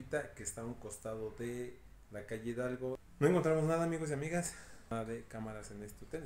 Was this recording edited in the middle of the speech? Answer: yes; 2 cuts; at 3.1 s, 4.9 s

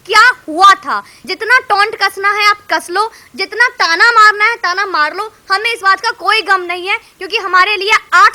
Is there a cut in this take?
yes; 1 cut; at 1.2 s

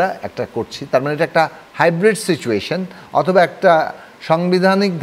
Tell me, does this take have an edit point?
no; 0 cuts

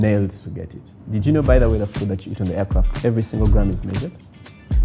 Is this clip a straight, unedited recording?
no; 1 cut; at 0.9 s

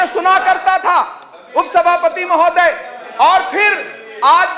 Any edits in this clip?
no; 0 cuts

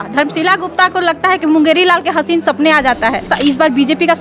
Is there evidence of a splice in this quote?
yes; 1 cut; at 3.3 s

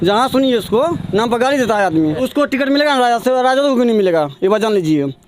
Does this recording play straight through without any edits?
no; 1 cut; at 2.2 s

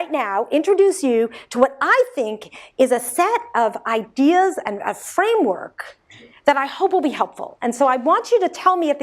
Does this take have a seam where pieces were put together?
yes; 1 cut; at 3.1 s

